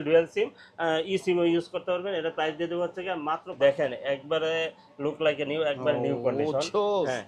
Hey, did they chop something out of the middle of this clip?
yes; 1 cut; at 3.5 s

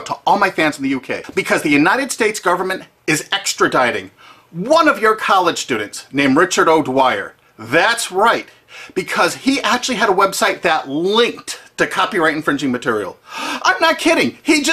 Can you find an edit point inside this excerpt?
no; 0 cuts

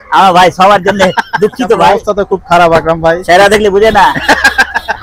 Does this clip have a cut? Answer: yes; 1 cut; at 2.0 s

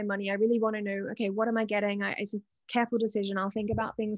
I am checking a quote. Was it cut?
no; 0 cuts

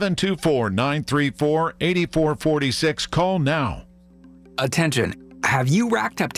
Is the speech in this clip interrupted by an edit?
yes; 1 cut; at 4.3 s

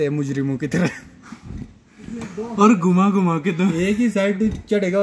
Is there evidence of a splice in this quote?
no; 0 cuts

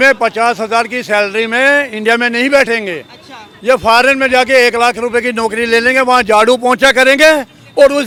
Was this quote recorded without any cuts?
yes; 0 cuts

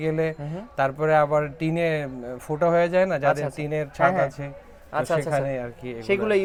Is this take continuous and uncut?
yes; 0 cuts

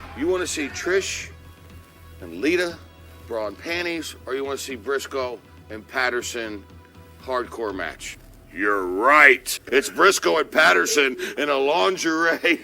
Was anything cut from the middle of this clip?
yes; 1 cut; at 9.5 s

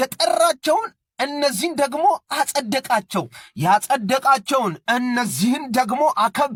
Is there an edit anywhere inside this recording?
no; 0 cuts

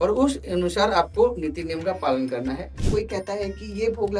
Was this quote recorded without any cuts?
no; 1 cut; at 2.7 s

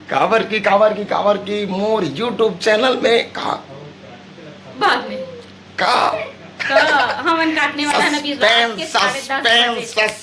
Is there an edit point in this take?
no; 0 cuts

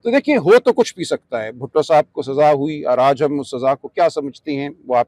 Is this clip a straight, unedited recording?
yes; 0 cuts

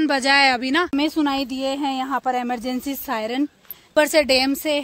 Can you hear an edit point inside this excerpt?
yes; 2 cuts; at 0.9 s, 3.9 s

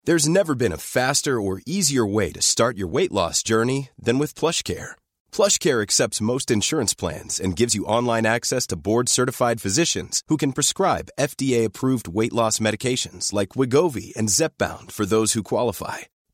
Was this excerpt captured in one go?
yes; 0 cuts

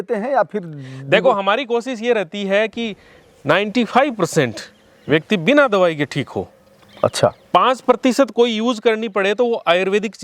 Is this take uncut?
yes; 0 cuts

